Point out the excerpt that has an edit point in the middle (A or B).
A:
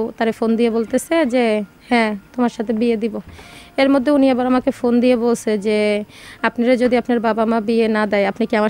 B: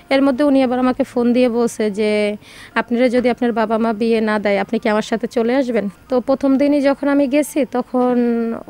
B